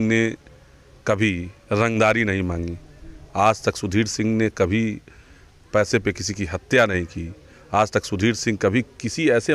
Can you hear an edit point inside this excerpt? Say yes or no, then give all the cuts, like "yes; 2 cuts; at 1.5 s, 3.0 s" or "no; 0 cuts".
no; 0 cuts